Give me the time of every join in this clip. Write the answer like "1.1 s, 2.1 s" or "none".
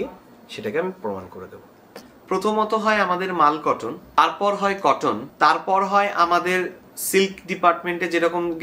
1.9 s, 5.3 s